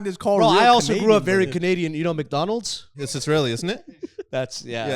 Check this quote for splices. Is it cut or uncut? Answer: cut